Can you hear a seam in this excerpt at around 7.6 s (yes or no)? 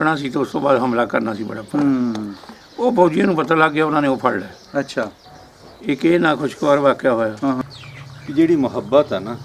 yes